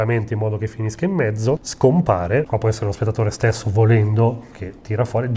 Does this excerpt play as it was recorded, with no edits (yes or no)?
no